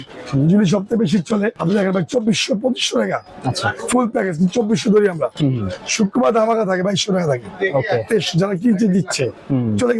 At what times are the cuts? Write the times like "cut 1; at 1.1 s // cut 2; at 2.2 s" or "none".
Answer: cut 1; at 1.6 s